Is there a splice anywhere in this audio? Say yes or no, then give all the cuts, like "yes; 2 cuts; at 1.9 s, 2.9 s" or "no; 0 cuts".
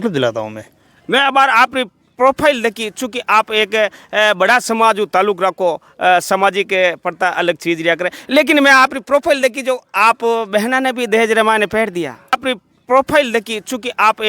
yes; 1 cut; at 12.4 s